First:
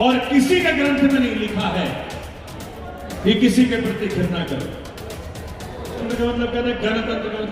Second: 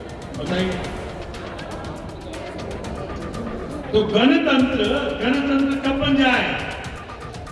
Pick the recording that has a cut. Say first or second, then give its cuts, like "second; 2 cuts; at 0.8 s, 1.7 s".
first; 1 cut; at 6.0 s